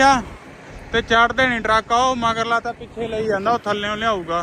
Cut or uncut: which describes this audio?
uncut